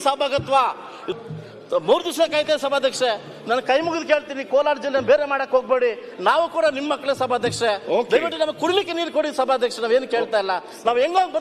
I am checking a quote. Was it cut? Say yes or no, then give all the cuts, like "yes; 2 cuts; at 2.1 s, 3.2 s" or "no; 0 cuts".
yes; 1 cut; at 1.1 s